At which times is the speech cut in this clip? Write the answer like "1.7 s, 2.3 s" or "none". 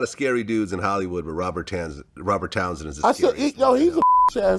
none